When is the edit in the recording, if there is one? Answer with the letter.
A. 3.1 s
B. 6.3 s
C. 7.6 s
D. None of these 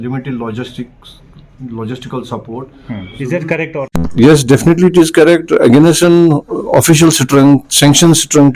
A